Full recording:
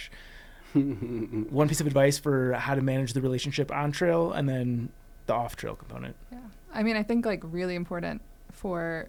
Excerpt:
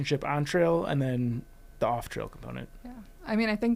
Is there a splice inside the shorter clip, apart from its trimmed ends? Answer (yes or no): no